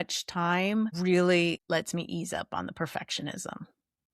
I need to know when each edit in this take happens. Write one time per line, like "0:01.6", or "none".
0:01.0
0:01.6